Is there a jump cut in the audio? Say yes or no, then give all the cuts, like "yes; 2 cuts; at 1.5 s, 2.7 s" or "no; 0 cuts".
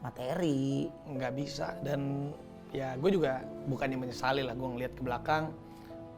no; 0 cuts